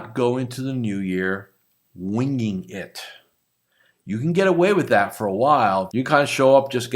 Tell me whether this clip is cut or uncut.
cut